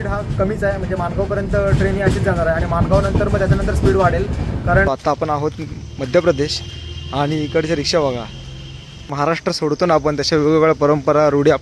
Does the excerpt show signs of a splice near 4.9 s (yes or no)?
yes